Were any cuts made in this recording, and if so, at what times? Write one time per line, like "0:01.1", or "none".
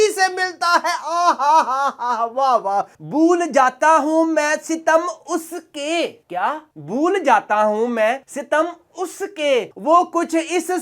0:02.9

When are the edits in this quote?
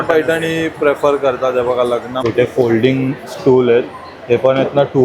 0:02.2

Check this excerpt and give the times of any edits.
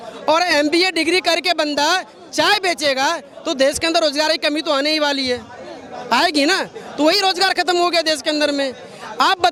none

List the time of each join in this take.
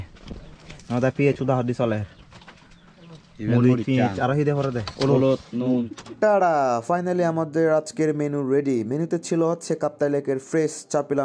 0:06.0

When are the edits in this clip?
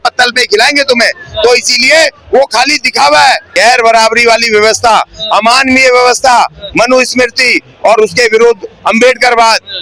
0:03.5

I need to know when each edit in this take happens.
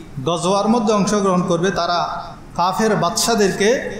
0:02.2

